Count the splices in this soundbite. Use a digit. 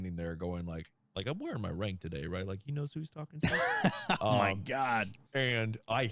2